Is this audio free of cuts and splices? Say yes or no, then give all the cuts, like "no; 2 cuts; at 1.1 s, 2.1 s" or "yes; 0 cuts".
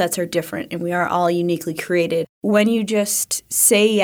no; 1 cut; at 2.3 s